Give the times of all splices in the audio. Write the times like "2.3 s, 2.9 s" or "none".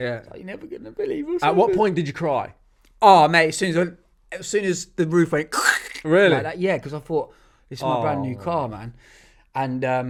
none